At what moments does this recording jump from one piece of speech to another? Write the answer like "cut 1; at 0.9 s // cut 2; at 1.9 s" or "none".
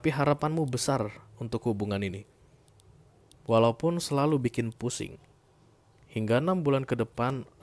none